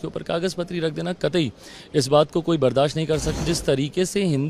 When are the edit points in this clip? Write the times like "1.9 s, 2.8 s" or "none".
3.4 s